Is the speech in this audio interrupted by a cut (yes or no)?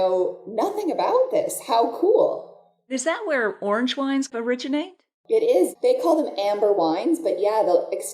yes